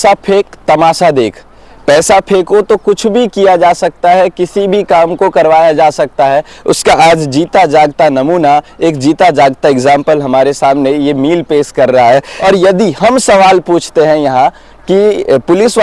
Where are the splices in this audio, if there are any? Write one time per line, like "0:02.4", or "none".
0:12.3